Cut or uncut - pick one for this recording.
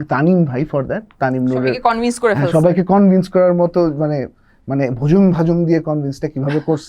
uncut